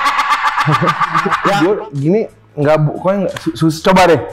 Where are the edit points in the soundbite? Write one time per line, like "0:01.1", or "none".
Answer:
0:01.6